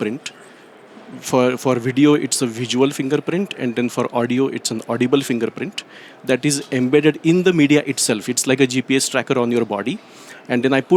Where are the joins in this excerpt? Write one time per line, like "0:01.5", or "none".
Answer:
none

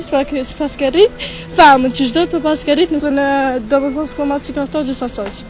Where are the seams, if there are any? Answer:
0:03.0

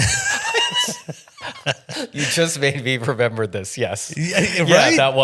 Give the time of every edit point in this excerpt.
none

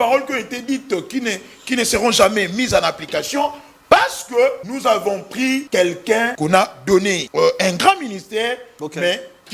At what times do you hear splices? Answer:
0:05.2
0:06.3
0:07.2

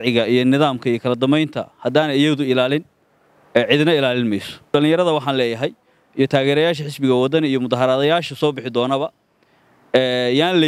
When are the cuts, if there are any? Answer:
0:04.7

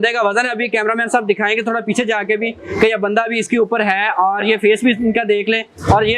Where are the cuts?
none

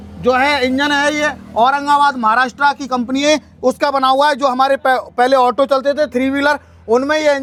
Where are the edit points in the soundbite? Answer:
none

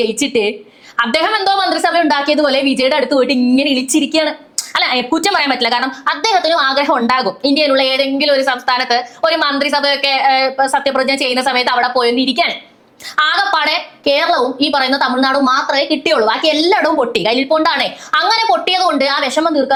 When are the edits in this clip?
none

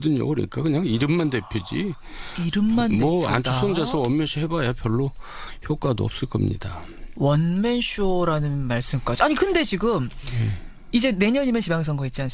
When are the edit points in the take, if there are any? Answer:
0:01.1

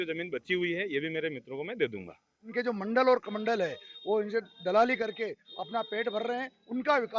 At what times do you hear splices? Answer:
0:02.5

